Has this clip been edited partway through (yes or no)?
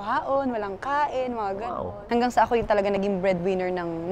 yes